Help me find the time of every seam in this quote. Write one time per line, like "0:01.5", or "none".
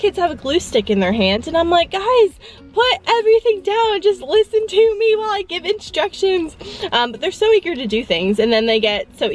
none